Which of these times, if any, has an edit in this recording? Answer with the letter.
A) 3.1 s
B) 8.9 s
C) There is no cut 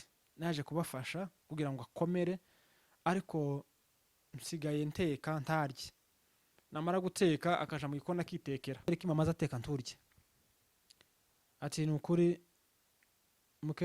B